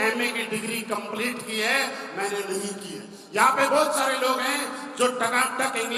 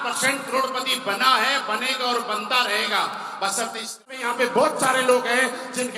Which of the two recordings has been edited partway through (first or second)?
second